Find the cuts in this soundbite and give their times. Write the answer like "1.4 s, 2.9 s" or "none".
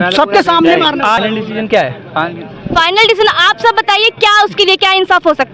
1.2 s